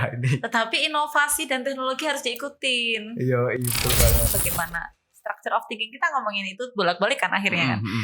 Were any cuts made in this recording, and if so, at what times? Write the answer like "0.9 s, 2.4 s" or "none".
4.3 s